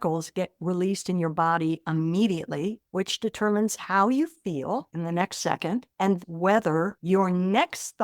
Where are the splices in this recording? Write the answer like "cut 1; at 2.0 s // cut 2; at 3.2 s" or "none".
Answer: cut 1; at 6.2 s